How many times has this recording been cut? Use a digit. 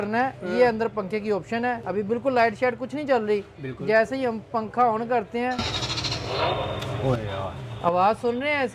1